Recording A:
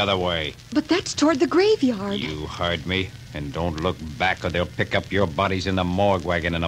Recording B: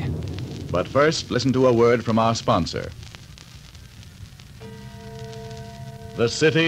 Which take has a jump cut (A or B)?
B